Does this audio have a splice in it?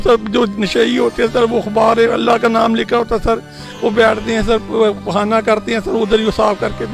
no; 0 cuts

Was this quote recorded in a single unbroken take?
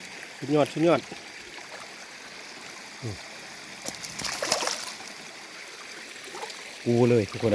yes; 0 cuts

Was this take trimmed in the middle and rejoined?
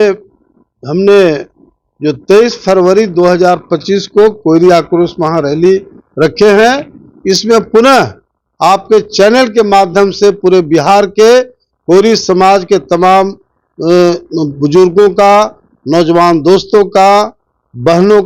no; 0 cuts

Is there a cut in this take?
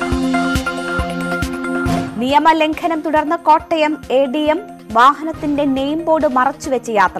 no; 0 cuts

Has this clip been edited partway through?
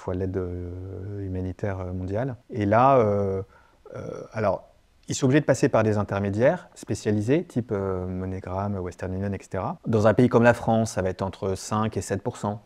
yes; 2 cuts; at 2.4 s, 9.8 s

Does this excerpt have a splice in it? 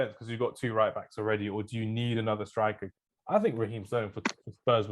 yes; 1 cut; at 2.9 s

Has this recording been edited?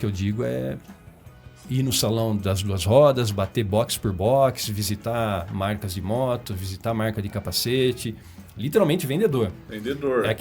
no; 0 cuts

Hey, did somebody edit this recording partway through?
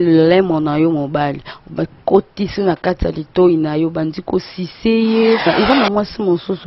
yes; 1 cut; at 5.5 s

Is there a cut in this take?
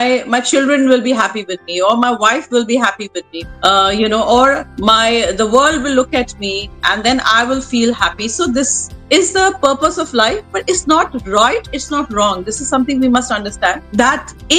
no; 0 cuts

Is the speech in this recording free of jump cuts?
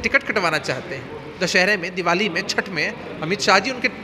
yes; 0 cuts

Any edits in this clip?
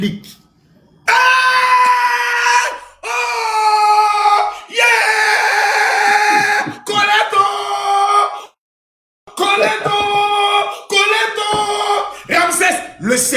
no; 0 cuts

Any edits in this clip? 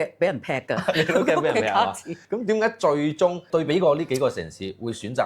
yes; 2 cuts; at 2.1 s, 3.5 s

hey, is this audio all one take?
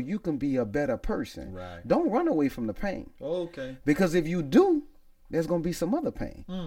yes; 0 cuts

